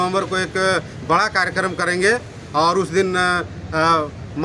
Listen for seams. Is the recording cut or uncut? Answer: uncut